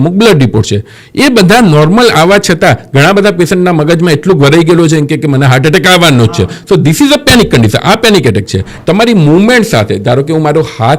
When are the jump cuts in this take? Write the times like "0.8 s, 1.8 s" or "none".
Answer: 8.7 s

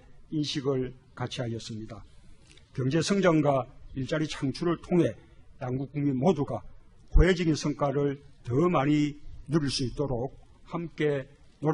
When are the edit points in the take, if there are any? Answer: 2.6 s

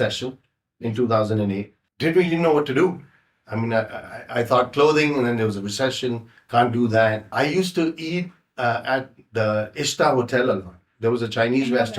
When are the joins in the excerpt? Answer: 1.8 s, 7.3 s

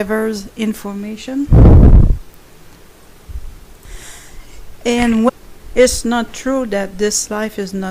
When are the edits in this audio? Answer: none

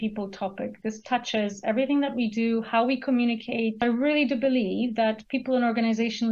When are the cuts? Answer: 3.8 s

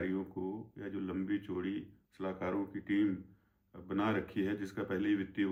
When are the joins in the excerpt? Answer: none

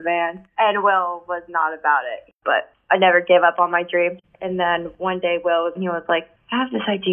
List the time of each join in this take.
2.4 s, 4.2 s, 5.7 s

